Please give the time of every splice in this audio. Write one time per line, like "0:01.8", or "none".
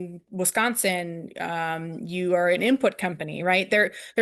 none